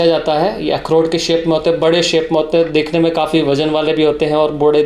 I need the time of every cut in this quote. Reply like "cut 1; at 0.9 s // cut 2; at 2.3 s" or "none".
none